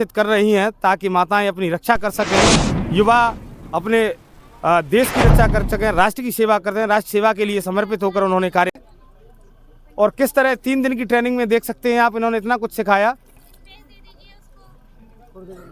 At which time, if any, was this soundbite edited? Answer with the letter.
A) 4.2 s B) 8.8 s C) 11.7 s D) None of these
B